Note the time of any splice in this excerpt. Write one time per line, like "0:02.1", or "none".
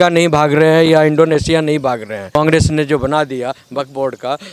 0:02.2